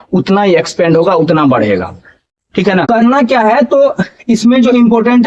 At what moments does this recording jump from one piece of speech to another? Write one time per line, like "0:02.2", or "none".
0:02.9